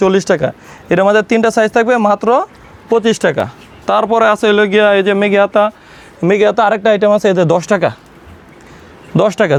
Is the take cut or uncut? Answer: uncut